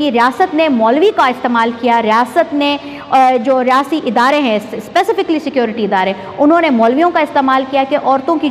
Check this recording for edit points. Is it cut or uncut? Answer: uncut